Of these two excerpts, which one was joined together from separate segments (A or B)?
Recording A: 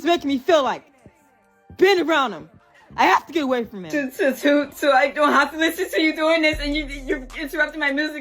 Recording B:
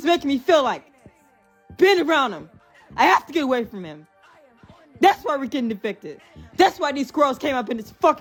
A